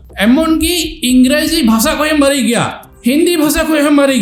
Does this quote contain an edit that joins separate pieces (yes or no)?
no